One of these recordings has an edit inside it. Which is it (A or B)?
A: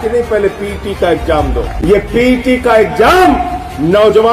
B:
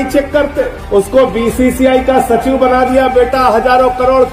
A